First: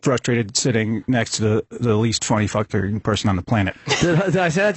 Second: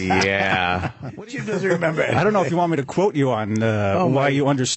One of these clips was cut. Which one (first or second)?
second